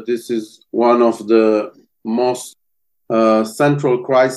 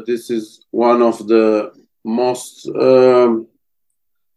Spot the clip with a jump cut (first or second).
first